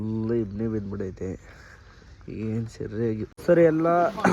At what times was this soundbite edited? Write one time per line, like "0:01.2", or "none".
0:03.3